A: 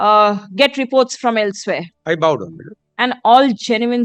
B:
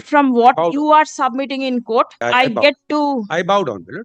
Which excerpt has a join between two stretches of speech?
B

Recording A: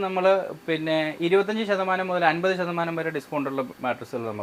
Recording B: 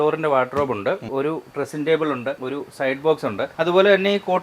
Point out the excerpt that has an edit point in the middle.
B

